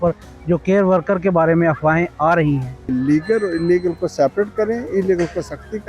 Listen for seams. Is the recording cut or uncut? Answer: cut